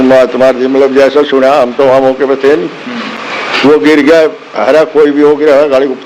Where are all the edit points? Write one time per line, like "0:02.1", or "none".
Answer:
none